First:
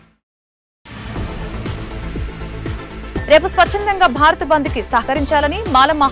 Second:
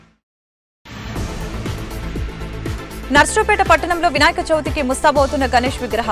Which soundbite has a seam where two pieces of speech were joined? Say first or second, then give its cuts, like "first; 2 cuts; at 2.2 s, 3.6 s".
second; 1 cut; at 3.0 s